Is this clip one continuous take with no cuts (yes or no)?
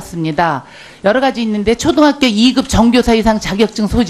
no